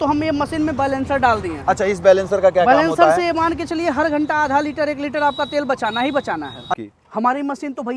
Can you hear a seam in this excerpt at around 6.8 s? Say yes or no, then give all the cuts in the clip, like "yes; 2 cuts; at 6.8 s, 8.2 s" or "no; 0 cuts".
yes; 1 cut; at 6.8 s